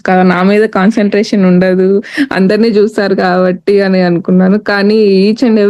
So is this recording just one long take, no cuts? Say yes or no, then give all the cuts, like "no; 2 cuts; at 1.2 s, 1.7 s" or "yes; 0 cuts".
yes; 0 cuts